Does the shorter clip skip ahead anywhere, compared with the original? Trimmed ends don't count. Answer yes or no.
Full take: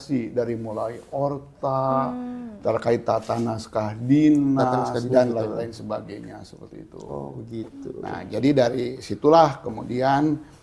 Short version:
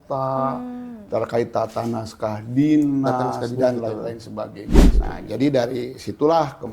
yes